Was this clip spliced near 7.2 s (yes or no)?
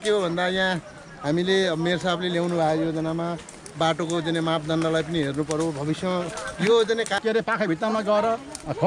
yes